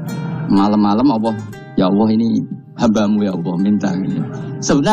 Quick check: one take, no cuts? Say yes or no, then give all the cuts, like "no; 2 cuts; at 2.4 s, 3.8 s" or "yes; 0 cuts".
yes; 0 cuts